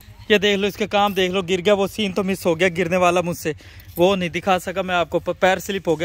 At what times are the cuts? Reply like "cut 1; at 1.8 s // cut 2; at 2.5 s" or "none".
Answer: none